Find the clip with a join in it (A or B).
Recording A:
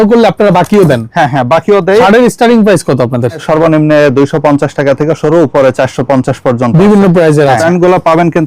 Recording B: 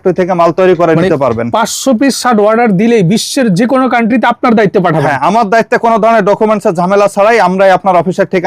A